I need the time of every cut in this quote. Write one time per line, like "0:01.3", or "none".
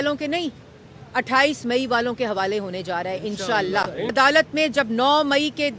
0:04.1